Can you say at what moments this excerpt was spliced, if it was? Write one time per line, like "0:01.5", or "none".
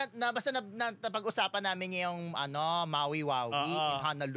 none